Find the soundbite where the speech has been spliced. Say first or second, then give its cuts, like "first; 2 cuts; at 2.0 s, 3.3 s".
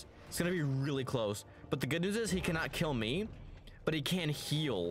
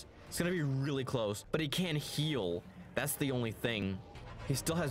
second; 2 cuts; at 1.4 s, 3.8 s